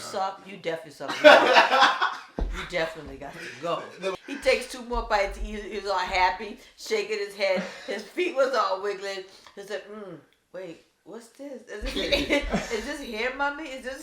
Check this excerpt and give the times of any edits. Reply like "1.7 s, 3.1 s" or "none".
4.1 s